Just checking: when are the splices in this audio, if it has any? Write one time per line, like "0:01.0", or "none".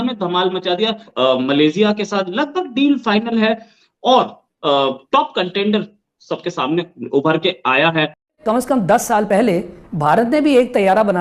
0:01.1
0:08.4